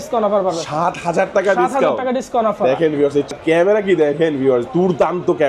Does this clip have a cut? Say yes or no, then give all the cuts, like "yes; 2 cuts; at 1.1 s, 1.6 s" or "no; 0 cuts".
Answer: yes; 1 cut; at 3.3 s